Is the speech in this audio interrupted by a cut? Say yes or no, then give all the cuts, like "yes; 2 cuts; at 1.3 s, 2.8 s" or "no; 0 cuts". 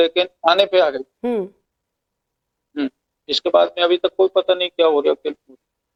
no; 0 cuts